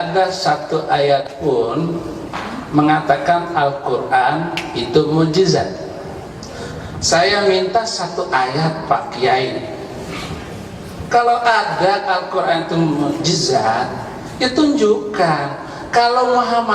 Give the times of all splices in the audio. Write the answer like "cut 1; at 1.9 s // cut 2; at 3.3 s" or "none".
cut 1; at 1.3 s